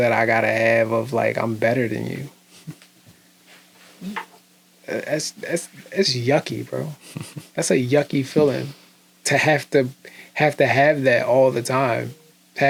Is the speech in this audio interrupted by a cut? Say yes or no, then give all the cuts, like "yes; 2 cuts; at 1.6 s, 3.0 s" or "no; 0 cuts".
no; 0 cuts